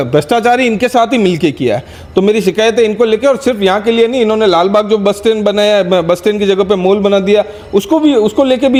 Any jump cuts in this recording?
no; 0 cuts

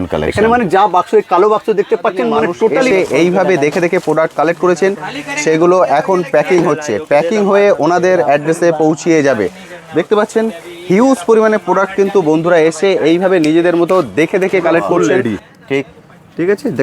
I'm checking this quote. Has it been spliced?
yes; 2 cuts; at 2.9 s, 15.1 s

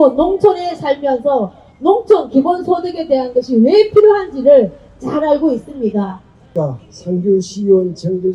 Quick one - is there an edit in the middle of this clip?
no; 0 cuts

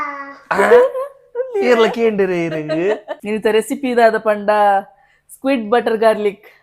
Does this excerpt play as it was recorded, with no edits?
no; 1 cut; at 3.1 s

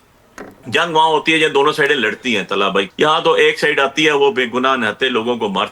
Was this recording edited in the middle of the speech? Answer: yes; 1 cut; at 2.9 s

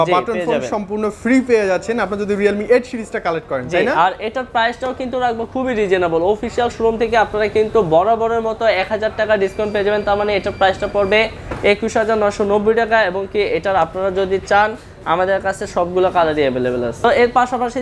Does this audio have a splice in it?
no; 0 cuts

